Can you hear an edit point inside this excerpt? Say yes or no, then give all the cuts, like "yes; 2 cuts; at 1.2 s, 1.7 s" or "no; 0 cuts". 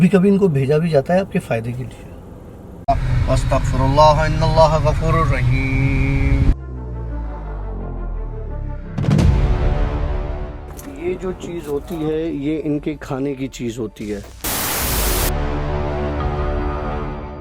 yes; 1 cut; at 2.8 s